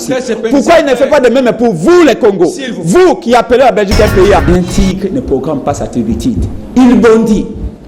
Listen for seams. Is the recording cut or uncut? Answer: cut